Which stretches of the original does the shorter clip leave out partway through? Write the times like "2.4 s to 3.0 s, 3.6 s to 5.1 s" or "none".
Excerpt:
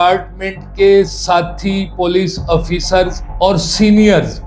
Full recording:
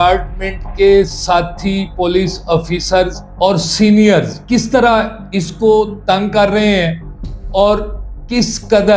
none